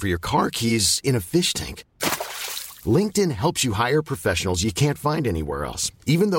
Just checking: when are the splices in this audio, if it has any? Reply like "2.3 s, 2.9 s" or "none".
none